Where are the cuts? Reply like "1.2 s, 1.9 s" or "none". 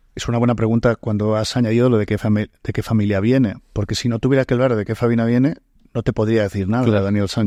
none